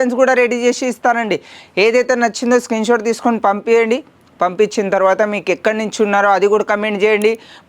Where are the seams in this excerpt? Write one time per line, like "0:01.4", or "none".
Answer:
none